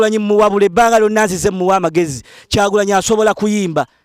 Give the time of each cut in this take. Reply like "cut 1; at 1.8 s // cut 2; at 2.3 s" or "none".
none